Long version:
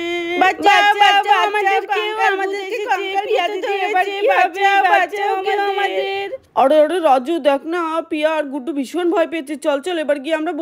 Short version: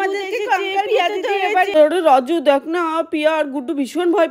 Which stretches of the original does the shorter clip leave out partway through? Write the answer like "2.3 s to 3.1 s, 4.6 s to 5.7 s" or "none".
4.1 s to 6.7 s